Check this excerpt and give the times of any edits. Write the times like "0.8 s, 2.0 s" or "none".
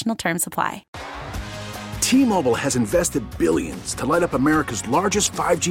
0.9 s